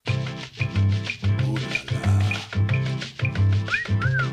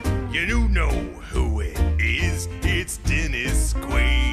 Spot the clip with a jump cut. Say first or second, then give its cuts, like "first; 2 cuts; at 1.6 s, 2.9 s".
second; 1 cut; at 2.2 s